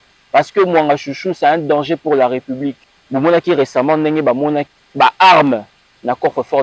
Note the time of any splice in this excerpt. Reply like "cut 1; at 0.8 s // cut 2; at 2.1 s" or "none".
cut 1; at 2.9 s // cut 2; at 4.8 s